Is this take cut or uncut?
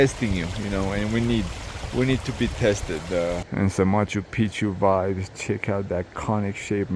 cut